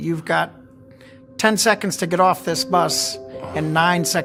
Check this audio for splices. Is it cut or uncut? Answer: uncut